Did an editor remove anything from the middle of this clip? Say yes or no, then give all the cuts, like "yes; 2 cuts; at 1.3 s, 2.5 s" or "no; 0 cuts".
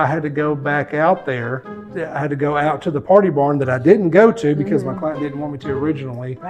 no; 0 cuts